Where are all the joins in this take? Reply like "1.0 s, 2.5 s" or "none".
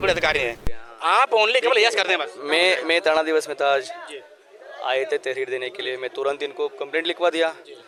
none

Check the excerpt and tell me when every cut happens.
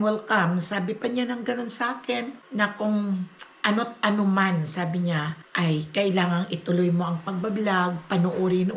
2.4 s, 5.4 s

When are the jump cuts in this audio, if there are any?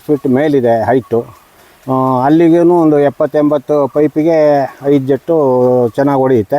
none

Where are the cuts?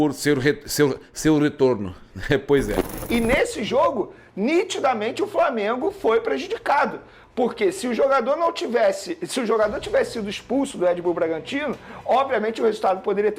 2.9 s

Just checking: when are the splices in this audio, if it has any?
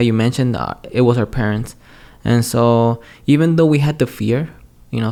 none

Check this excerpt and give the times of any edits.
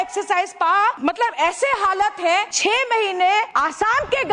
1.0 s, 2.5 s, 3.5 s

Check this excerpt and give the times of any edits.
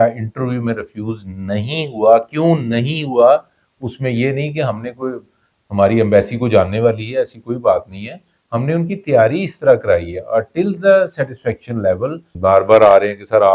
12.2 s

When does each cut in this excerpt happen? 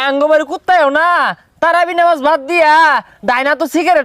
none

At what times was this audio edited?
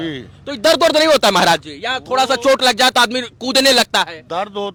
none

